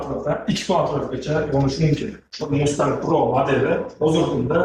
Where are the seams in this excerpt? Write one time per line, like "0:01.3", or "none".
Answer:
0:02.4